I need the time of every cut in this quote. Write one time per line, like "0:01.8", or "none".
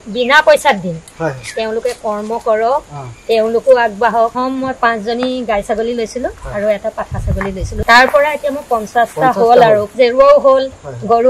0:04.3
0:07.7
0:09.9